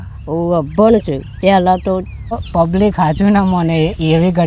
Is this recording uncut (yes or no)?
no